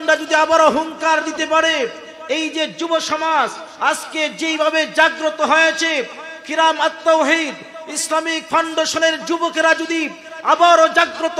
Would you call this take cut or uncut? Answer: uncut